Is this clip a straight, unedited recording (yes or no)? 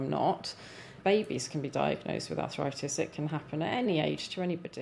no